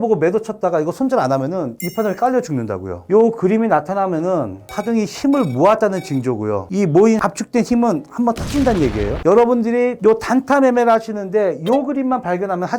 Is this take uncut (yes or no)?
no